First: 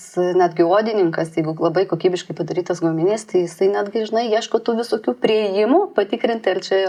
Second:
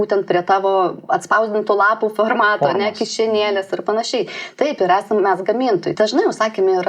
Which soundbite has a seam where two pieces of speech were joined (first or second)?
second